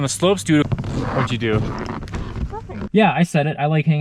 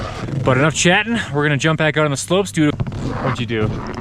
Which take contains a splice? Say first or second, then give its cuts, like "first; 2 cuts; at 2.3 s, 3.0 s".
first; 1 cut; at 2.9 s